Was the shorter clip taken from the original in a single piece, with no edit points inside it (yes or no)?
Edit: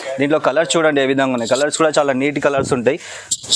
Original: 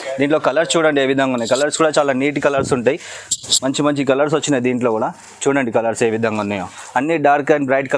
yes